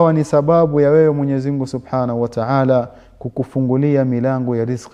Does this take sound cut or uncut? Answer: uncut